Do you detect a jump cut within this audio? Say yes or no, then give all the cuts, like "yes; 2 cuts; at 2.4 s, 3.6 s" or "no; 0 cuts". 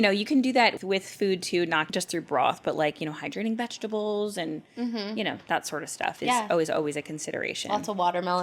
yes; 2 cuts; at 0.8 s, 1.9 s